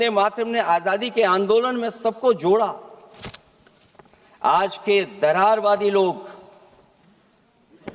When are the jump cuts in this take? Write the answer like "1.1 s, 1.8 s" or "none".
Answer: none